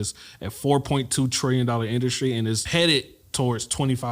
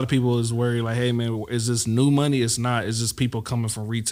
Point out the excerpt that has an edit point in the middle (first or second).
first